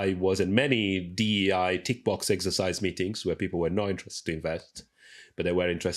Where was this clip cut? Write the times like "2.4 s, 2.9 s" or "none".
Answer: none